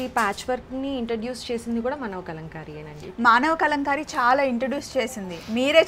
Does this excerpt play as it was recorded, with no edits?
yes; 0 cuts

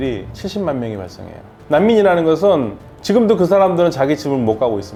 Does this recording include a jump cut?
no; 0 cuts

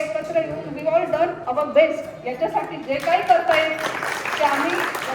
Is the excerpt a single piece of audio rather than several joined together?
yes; 0 cuts

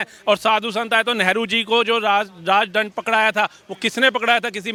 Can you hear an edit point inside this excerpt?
no; 0 cuts

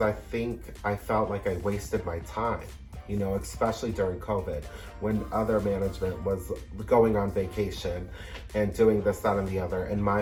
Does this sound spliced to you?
no; 0 cuts

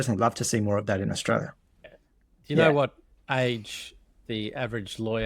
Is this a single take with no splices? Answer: no; 1 cut; at 1.8 s

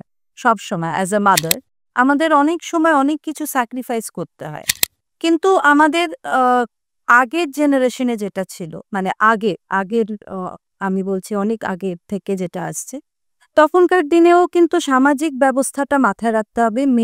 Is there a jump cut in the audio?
no; 0 cuts

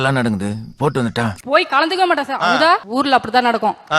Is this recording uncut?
no; 2 cuts; at 1.4 s, 2.9 s

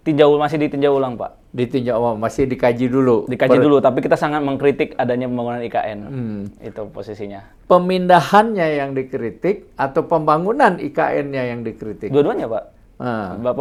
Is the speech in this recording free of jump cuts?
yes; 0 cuts

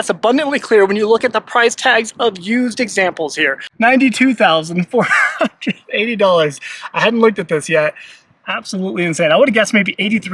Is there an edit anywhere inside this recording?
yes; 1 cut; at 3.6 s

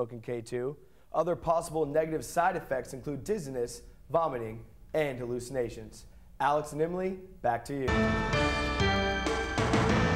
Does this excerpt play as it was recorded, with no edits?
no; 1 cut; at 7.9 s

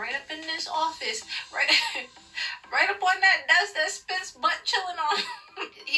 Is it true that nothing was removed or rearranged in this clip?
yes; 0 cuts

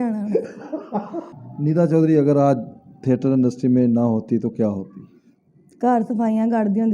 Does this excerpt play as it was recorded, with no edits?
no; 1 cut; at 1.4 s

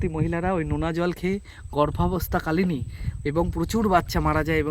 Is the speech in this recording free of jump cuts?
yes; 0 cuts

